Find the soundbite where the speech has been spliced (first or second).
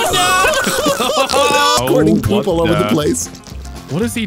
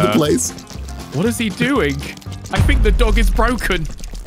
first